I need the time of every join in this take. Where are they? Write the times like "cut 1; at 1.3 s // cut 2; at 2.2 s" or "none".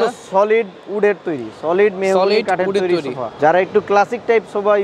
cut 1; at 3.3 s